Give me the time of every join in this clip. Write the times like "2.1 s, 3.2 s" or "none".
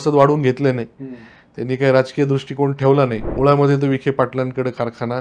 3.2 s